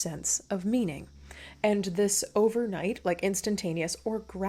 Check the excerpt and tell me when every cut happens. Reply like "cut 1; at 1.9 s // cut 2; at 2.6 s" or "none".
none